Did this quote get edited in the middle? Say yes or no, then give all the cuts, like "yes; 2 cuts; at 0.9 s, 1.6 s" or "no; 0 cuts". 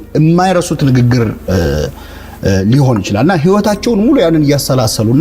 no; 0 cuts